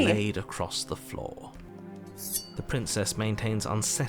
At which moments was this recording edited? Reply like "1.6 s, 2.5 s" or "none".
1.6 s

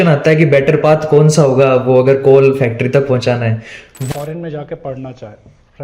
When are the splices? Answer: 3.9 s

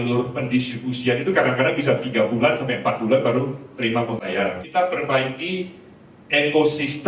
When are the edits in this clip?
4.6 s

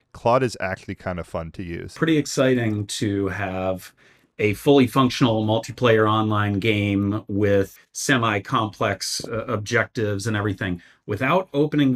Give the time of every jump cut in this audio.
2.0 s, 7.8 s

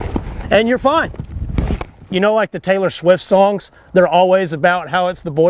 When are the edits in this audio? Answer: 1.9 s

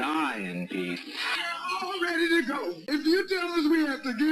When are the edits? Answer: 2.8 s

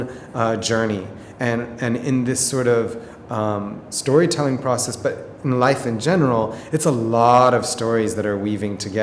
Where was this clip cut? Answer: none

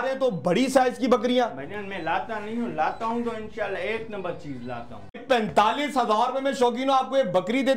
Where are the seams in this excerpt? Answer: 5.2 s

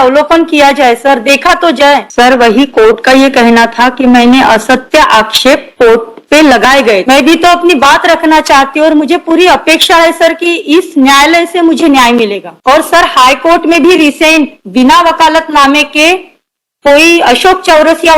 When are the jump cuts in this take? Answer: 2.1 s, 7.0 s

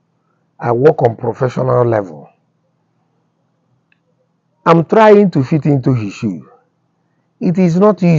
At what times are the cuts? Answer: none

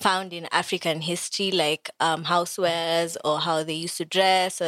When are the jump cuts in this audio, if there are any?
none

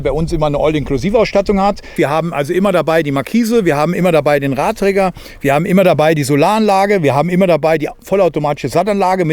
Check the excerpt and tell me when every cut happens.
1.9 s

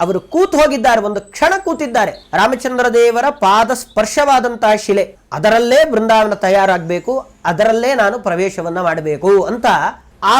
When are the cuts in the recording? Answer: 2.2 s, 5.2 s

